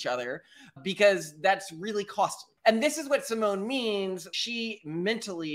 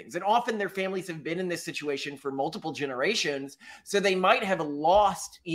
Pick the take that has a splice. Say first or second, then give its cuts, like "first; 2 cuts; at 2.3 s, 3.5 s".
first; 2 cuts; at 2.6 s, 4.3 s